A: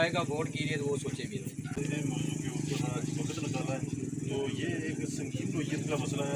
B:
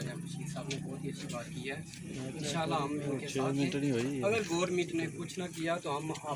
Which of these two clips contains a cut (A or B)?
A